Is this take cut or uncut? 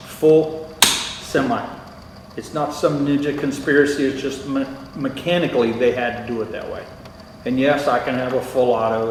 uncut